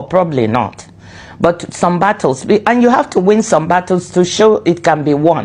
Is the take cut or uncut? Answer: uncut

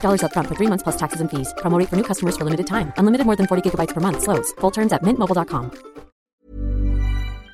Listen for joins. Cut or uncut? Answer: cut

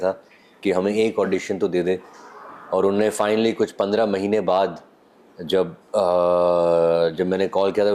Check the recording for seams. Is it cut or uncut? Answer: uncut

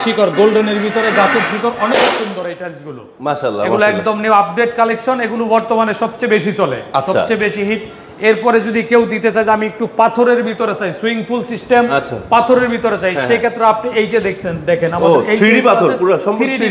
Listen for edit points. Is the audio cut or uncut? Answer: uncut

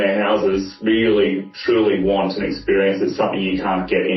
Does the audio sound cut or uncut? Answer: uncut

